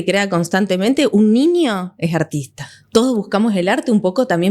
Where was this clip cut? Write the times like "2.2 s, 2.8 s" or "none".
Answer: 2.7 s